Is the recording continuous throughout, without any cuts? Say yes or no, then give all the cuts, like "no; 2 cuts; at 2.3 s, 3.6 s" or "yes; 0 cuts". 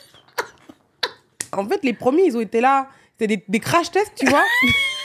no; 1 cut; at 1.5 s